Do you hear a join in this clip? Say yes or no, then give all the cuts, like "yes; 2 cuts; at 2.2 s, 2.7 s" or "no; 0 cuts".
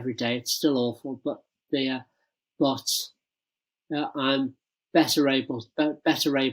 no; 0 cuts